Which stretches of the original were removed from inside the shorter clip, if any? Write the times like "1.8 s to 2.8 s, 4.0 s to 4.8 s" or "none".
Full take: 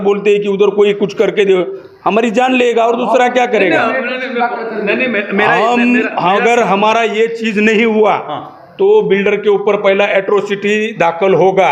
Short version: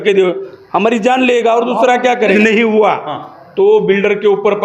3.7 s to 7.6 s